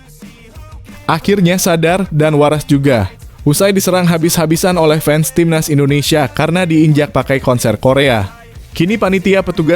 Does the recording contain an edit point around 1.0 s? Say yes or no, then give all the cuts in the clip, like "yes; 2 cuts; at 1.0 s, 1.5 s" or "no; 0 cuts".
yes; 1 cut; at 1.0 s